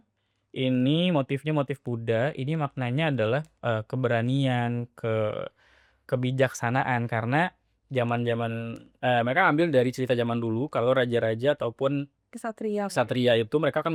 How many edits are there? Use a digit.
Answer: 0